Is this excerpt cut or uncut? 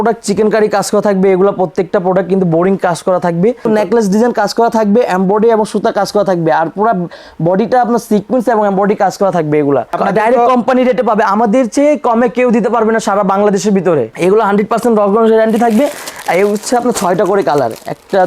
cut